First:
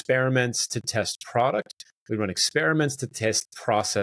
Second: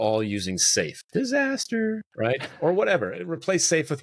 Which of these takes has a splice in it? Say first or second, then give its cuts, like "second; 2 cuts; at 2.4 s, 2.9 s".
second; 2 cuts; at 1.0 s, 2.1 s